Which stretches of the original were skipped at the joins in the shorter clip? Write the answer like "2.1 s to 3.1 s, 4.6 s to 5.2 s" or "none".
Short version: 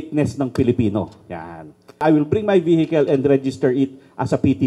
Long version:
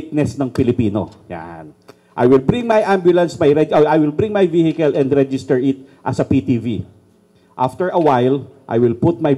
2.0 s to 3.9 s